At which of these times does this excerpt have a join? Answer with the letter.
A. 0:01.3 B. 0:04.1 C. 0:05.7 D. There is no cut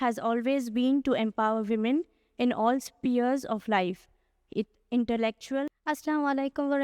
C